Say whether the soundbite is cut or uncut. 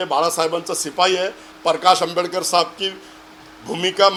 uncut